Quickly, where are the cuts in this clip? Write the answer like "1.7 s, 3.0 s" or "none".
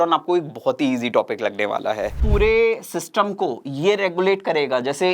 2.2 s